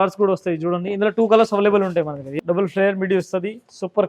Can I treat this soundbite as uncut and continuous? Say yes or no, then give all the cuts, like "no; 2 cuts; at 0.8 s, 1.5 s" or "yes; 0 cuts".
no; 1 cut; at 2.2 s